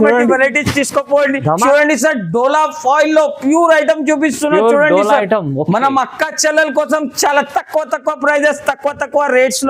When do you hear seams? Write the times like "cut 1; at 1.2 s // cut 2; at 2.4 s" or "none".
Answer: cut 1; at 1.6 s